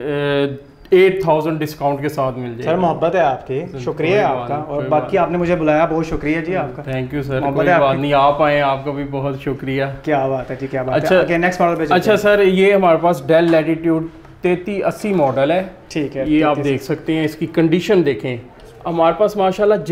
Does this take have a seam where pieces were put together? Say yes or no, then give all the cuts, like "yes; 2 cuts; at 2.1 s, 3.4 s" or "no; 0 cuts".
no; 0 cuts